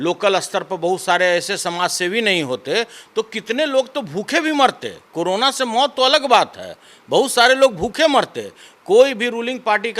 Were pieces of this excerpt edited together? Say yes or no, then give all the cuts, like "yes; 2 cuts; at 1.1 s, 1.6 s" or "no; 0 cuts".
no; 0 cuts